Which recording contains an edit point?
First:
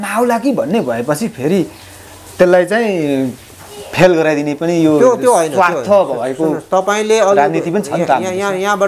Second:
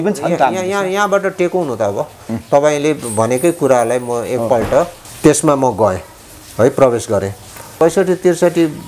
second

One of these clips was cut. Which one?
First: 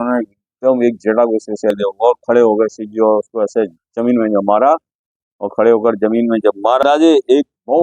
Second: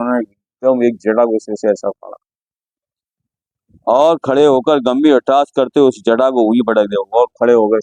first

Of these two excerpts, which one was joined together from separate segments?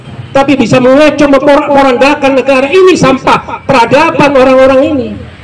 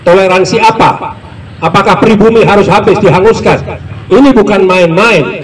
second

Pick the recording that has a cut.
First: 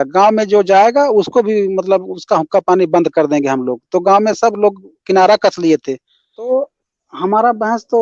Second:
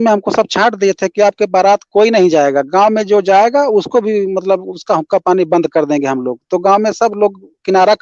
first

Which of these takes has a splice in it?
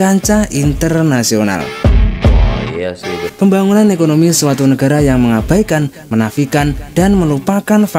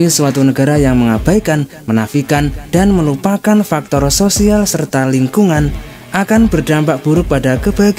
first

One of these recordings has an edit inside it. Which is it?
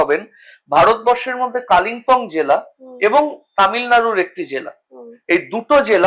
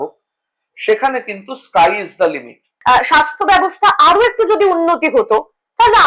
second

